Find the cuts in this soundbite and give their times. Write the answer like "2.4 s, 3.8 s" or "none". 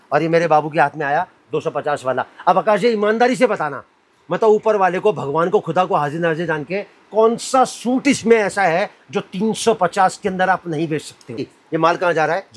11.4 s